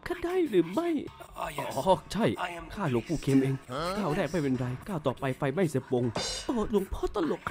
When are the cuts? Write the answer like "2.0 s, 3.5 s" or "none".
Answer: 1.2 s